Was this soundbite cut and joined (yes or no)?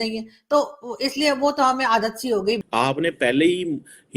yes